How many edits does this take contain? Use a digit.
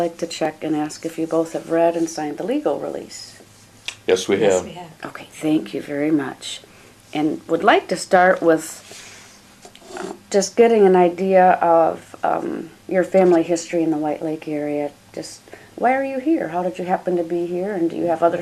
0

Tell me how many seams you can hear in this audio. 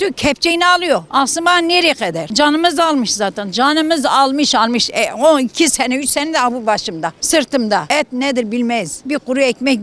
5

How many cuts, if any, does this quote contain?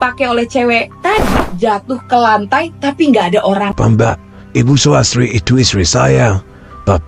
1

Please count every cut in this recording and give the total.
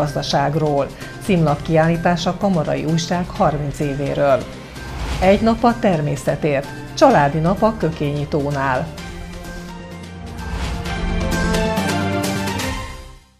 1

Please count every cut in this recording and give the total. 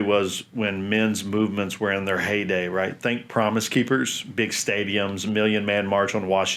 0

